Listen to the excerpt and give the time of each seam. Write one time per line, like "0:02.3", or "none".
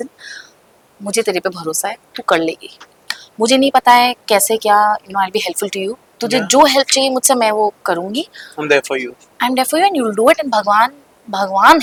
none